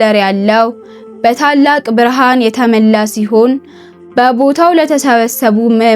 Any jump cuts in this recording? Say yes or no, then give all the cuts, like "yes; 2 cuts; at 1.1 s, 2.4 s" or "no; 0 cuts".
no; 0 cuts